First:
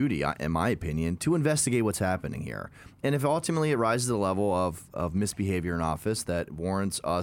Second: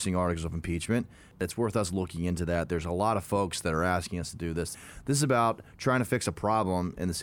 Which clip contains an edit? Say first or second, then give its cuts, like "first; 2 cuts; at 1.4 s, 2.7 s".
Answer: second; 2 cuts; at 1.4 s, 4.8 s